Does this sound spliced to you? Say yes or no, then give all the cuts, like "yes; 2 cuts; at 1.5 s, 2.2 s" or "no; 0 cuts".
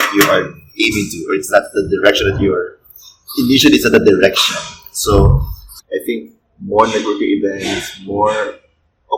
yes; 1 cut; at 5.7 s